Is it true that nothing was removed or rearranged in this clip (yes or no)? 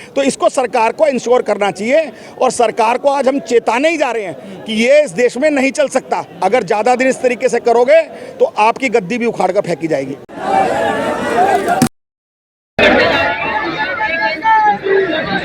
no